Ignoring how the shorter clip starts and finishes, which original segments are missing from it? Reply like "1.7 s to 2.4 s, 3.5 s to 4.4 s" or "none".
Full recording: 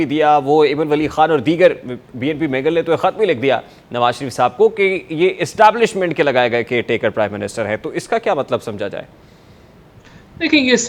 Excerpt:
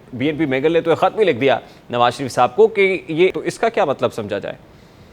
5.4 s to 7.9 s